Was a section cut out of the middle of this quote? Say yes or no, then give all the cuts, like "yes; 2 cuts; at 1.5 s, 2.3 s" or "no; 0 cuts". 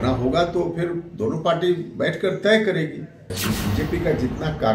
yes; 1 cut; at 3.3 s